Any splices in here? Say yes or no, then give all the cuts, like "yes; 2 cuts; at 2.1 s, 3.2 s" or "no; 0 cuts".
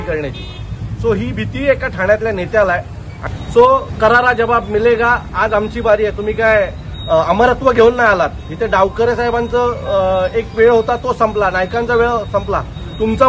yes; 1 cut; at 3.2 s